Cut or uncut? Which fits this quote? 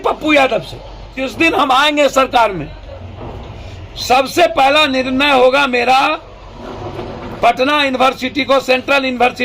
cut